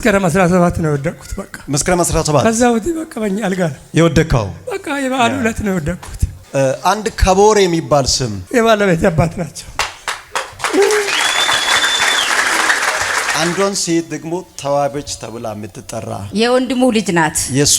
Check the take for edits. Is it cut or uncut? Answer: cut